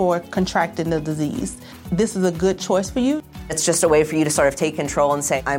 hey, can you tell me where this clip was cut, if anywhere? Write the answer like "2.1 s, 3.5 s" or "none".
none